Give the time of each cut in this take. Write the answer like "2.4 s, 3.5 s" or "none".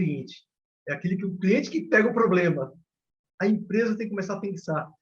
3.2 s